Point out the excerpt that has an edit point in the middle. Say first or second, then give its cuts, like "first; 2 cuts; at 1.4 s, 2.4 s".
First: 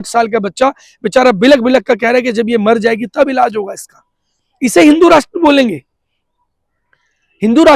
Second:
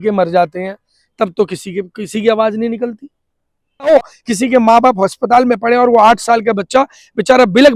second; 1 cut; at 3.9 s